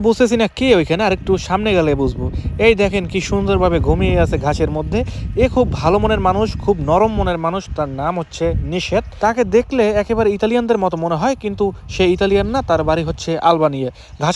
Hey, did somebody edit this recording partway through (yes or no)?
no